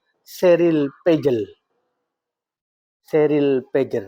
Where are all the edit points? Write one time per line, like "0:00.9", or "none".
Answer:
none